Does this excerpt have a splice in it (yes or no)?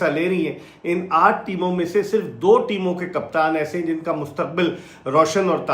no